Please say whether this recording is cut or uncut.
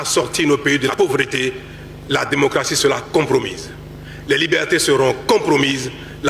cut